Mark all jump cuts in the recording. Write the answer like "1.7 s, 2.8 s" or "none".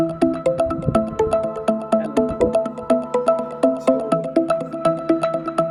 none